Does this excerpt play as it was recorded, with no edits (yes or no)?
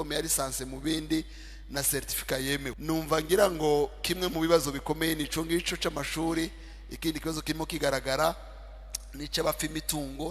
no